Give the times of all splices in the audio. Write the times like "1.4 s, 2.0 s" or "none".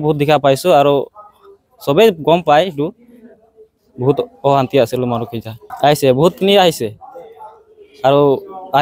5.6 s